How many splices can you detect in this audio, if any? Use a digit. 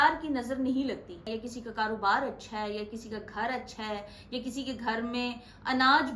1